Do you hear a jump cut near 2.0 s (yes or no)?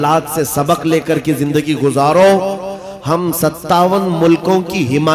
no